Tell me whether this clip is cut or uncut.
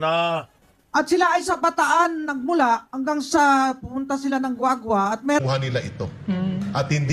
cut